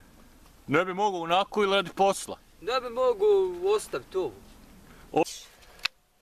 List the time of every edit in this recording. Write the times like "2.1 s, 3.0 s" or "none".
5.2 s